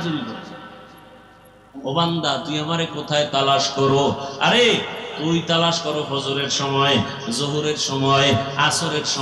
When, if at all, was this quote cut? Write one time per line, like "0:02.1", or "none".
0:01.7